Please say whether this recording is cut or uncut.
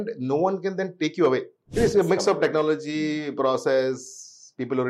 cut